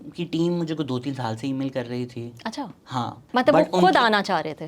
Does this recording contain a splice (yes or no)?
yes